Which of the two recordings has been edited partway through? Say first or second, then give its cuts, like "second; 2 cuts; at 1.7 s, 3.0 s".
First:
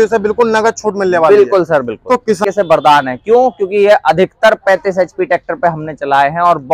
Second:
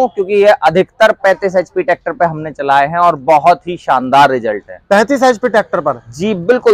first; 1 cut; at 2.4 s